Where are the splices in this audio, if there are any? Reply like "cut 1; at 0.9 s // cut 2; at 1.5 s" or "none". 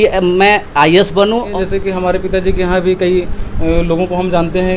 cut 1; at 1.5 s